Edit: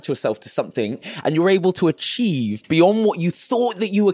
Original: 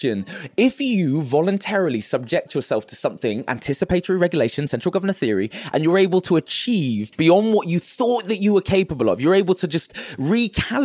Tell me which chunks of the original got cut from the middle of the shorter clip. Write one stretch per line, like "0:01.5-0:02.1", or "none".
0:03.5-0:05.6